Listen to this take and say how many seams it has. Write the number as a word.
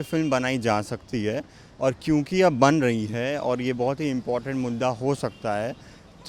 zero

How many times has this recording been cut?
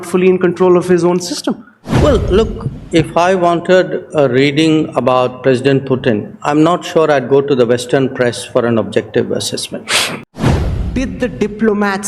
one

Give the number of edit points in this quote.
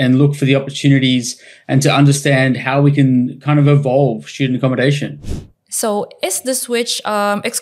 one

